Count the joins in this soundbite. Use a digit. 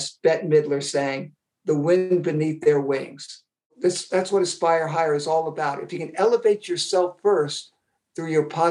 1